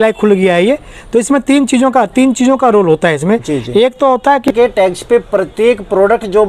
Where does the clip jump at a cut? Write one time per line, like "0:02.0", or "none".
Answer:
0:04.5